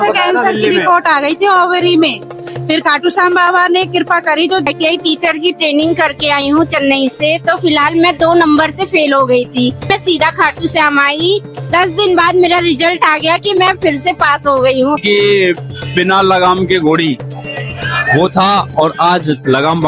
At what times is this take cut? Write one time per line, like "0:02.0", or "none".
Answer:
0:04.7
0:09.9
0:11.5
0:15.0